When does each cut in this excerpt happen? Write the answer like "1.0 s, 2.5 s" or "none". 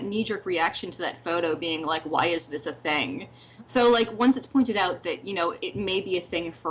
3.7 s, 5.6 s